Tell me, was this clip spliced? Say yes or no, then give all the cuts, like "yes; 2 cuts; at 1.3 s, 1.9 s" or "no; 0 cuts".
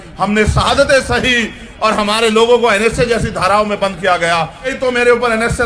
yes; 1 cut; at 4.7 s